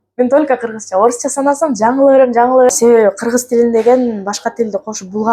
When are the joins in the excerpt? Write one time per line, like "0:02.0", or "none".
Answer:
0:02.7